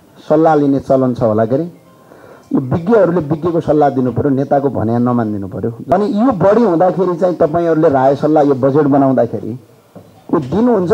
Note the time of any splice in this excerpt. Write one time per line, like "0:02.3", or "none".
0:05.9